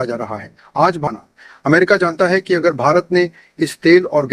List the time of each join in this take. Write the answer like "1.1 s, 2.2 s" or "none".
1.1 s